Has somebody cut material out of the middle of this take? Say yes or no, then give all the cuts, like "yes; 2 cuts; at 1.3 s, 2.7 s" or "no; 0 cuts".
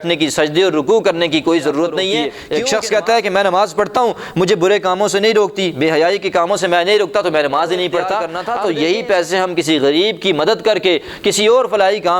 yes; 2 cuts; at 2.4 s, 8.3 s